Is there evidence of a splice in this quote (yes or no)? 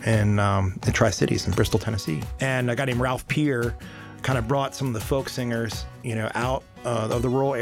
yes